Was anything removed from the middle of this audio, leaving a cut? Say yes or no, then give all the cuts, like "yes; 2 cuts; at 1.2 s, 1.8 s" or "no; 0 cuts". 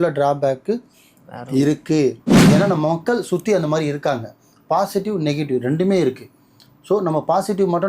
yes; 1 cut; at 2.3 s